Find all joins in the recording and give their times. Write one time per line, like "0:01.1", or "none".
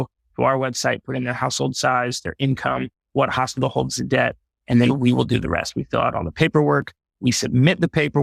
none